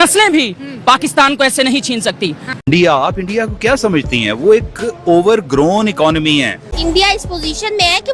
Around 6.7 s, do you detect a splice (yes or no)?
yes